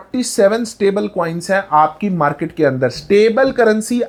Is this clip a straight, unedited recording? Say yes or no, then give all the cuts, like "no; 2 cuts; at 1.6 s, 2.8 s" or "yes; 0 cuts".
yes; 0 cuts